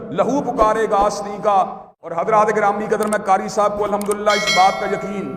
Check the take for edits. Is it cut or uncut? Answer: cut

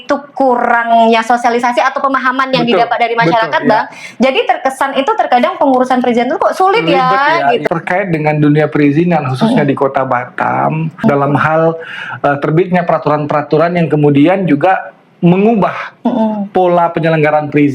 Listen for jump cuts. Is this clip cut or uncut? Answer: cut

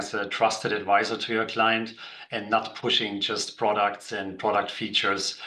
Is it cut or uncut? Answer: uncut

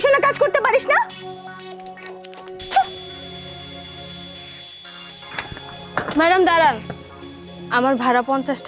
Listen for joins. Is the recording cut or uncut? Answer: uncut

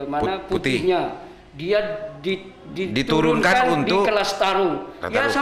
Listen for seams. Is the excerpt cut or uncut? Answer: uncut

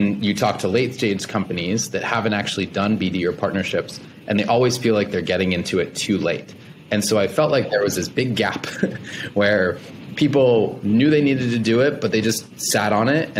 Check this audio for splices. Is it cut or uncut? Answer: uncut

